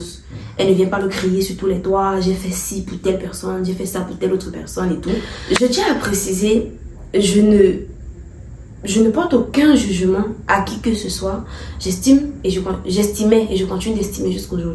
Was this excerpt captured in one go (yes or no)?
no